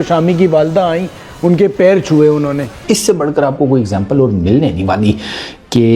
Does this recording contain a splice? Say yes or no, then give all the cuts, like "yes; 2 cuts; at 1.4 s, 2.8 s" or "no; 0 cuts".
yes; 1 cut; at 2.7 s